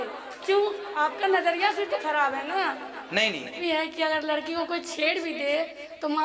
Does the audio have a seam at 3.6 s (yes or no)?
yes